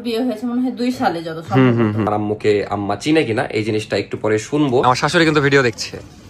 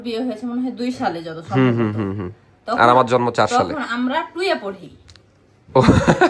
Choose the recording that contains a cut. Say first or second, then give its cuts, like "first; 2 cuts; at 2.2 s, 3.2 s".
first; 2 cuts; at 2.1 s, 4.8 s